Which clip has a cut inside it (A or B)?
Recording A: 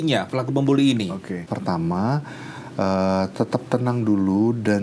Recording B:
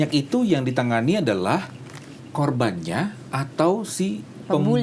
A